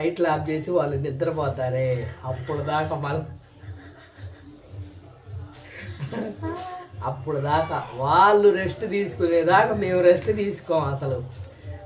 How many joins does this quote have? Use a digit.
0